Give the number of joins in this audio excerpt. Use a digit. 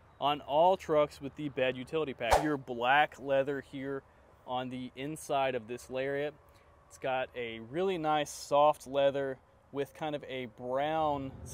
1